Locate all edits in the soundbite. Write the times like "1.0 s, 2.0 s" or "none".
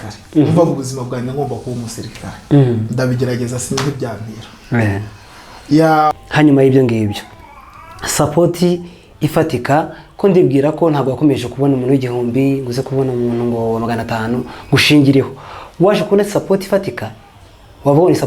6.2 s